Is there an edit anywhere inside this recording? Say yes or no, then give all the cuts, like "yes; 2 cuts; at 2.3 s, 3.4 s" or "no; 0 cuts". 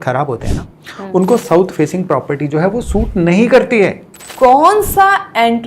yes; 1 cut; at 4.2 s